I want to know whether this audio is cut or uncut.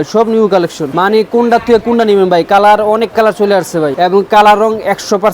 cut